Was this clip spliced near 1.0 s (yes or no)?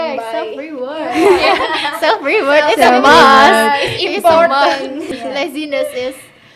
no